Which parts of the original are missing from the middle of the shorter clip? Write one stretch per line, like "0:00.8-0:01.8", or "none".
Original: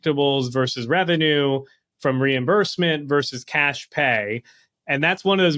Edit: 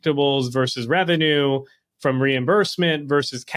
none